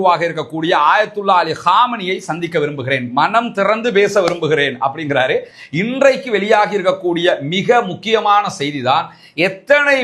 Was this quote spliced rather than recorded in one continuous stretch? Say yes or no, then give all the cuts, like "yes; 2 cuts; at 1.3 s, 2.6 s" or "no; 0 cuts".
yes; 1 cut; at 5.6 s